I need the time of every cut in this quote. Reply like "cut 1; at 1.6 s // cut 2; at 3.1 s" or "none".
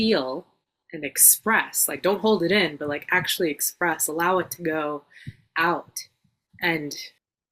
cut 1; at 6.4 s